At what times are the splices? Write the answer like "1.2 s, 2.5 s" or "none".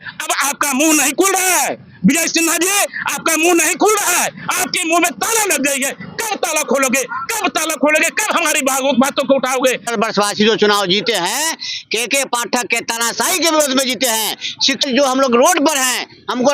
9.9 s, 14.8 s